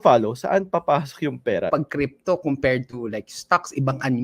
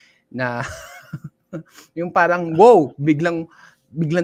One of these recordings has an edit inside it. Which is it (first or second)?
first